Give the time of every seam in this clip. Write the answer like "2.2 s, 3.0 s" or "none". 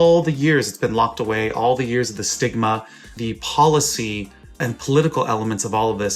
3.1 s, 4.7 s